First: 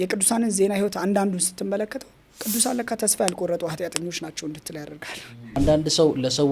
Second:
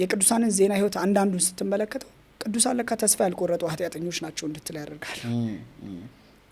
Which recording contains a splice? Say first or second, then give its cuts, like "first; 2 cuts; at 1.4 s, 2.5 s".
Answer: first; 1 cut; at 5.6 s